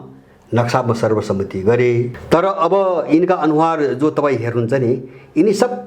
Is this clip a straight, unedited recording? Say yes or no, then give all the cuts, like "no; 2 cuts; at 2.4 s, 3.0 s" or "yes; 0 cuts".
no; 1 cut; at 2.2 s